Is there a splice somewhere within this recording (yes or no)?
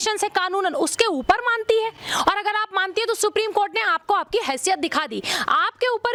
no